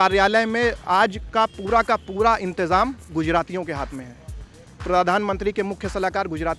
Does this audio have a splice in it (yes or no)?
no